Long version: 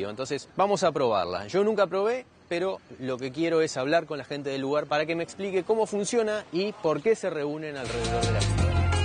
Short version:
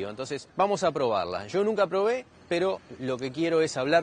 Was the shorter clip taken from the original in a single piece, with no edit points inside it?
yes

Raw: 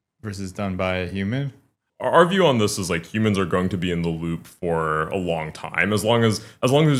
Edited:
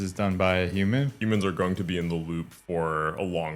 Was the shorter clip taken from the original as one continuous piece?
no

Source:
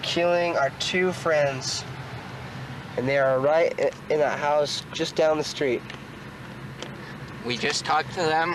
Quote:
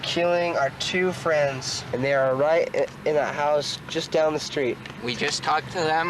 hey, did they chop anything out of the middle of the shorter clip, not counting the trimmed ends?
yes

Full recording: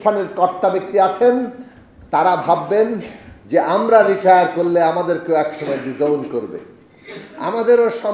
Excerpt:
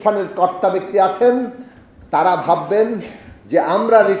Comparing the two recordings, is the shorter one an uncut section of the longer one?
yes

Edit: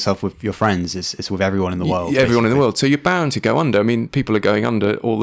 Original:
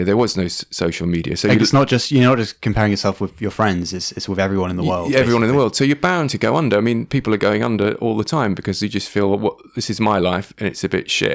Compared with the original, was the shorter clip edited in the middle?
no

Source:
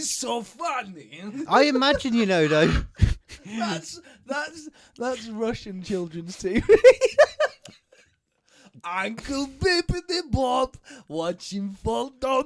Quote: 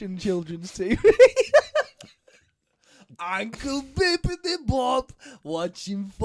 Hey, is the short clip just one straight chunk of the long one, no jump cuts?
yes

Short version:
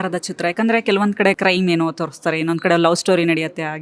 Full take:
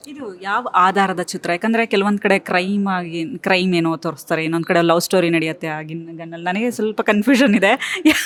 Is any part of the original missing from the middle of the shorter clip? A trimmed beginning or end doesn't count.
yes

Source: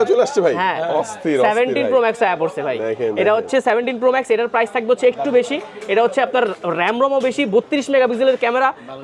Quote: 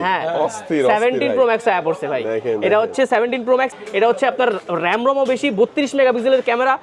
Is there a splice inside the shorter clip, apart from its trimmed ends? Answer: yes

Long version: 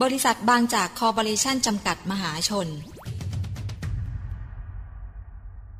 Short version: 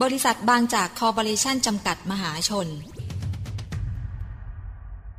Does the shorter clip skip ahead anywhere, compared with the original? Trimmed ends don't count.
yes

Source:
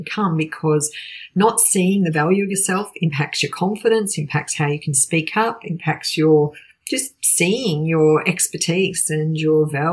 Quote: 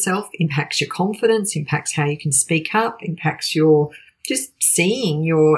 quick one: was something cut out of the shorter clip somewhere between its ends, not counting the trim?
no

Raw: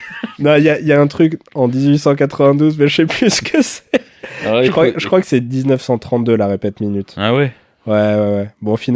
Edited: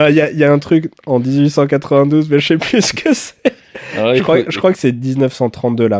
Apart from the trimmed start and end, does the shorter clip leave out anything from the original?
no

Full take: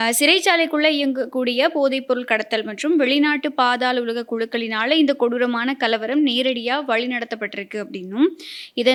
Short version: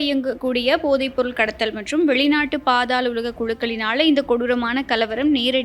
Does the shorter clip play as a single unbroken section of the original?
yes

